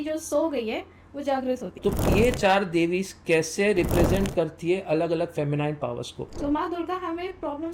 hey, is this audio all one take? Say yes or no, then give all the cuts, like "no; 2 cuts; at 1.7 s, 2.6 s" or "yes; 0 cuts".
no; 2 cuts; at 1.7 s, 6.3 s